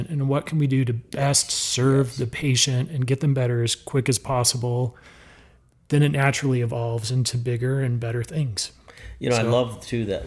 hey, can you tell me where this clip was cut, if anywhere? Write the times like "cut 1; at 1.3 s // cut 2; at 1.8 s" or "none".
none